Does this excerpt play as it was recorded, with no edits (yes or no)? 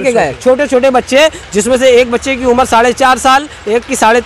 yes